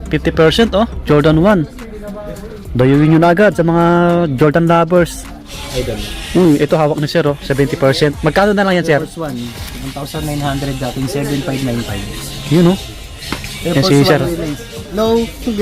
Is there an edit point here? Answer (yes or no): yes